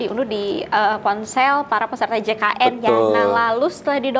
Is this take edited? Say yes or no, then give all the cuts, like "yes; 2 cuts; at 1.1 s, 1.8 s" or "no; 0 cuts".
no; 0 cuts